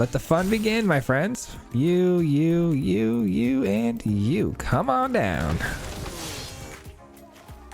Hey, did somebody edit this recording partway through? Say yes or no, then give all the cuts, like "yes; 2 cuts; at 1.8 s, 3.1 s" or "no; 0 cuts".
yes; 1 cut; at 6.7 s